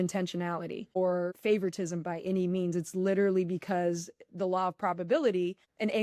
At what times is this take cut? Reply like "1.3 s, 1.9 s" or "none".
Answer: 1.2 s

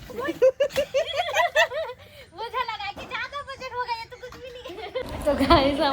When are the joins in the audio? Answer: 5.0 s

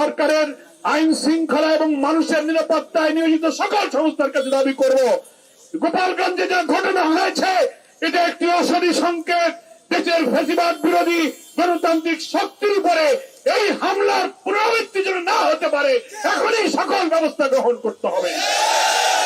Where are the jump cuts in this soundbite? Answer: none

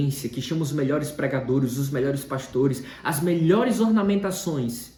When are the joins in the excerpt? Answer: none

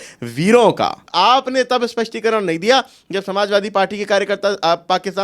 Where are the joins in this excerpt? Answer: 1.0 s

